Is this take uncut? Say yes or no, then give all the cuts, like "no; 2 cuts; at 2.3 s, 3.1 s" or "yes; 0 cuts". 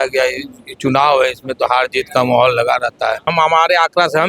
no; 1 cut; at 3.3 s